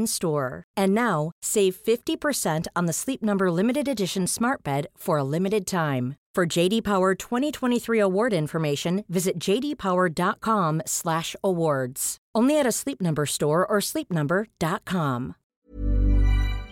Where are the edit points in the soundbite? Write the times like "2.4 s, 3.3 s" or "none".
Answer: 15.5 s